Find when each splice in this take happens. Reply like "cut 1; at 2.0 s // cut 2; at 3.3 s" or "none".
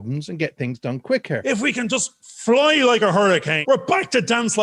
cut 1; at 1.4 s // cut 2; at 3.6 s

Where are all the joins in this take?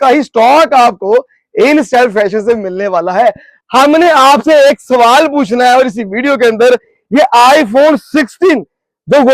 cut 1; at 3.5 s

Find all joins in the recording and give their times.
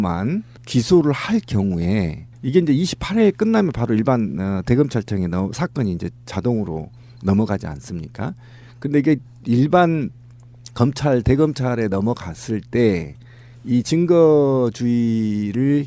cut 1; at 3.9 s

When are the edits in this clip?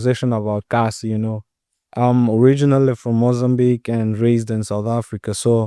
none

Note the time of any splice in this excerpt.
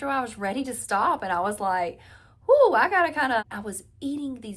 cut 1; at 3.4 s

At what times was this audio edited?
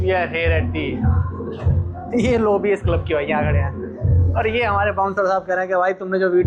none

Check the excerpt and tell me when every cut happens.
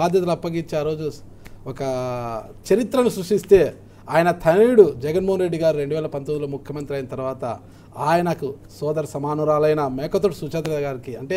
none

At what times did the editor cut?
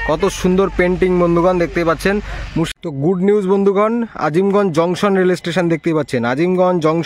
cut 1; at 2.7 s

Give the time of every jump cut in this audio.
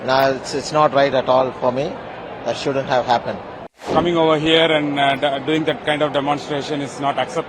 cut 1; at 3.7 s

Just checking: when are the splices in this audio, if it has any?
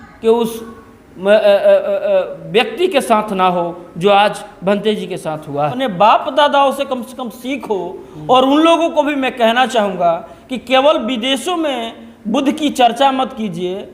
cut 1; at 5.7 s

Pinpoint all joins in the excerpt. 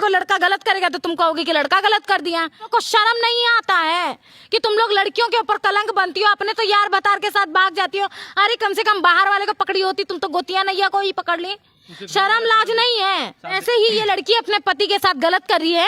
cut 1; at 2.7 s // cut 2; at 13.6 s

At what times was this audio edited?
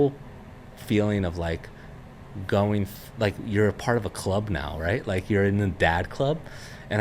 none

